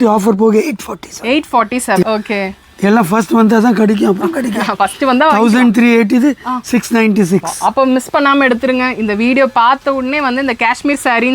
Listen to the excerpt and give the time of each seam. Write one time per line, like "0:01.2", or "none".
0:02.0